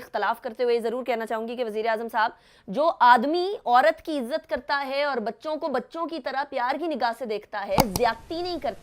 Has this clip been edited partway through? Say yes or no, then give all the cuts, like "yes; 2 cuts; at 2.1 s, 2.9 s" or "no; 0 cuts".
no; 0 cuts